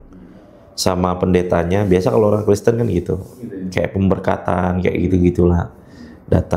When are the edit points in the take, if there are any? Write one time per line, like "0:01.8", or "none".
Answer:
none